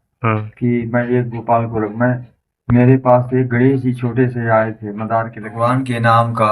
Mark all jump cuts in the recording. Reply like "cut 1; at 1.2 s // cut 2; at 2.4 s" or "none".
cut 1; at 5.4 s